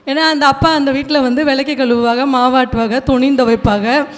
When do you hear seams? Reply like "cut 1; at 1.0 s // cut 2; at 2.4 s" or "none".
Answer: none